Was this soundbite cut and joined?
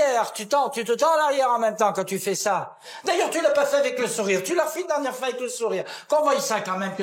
no; 0 cuts

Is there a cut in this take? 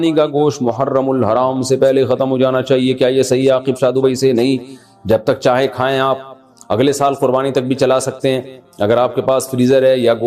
no; 0 cuts

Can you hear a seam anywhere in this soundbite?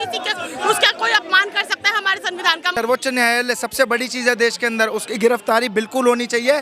yes; 1 cut; at 2.7 s

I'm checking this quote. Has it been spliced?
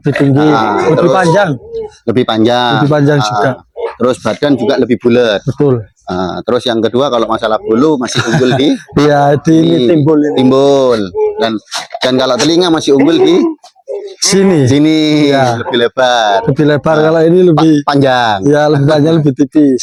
no; 0 cuts

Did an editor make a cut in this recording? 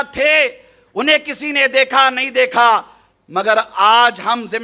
no; 0 cuts

